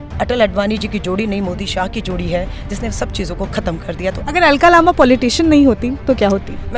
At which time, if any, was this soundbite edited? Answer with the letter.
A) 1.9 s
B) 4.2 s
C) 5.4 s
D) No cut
B